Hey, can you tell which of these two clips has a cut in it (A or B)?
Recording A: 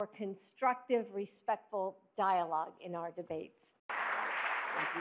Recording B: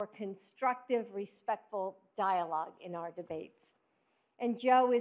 B